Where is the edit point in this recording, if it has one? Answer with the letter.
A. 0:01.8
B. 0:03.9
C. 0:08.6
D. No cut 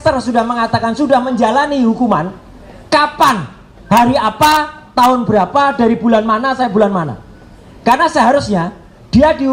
D